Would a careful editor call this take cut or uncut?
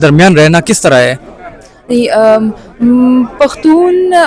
uncut